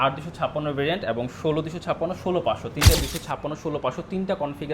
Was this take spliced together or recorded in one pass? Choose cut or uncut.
cut